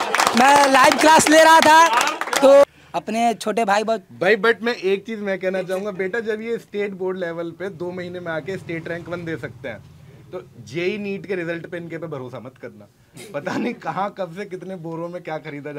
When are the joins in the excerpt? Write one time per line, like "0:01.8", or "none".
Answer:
none